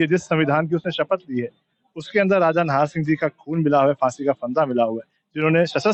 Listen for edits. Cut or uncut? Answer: uncut